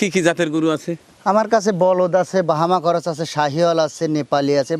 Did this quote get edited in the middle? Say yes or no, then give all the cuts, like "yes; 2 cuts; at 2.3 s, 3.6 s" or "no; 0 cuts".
no; 0 cuts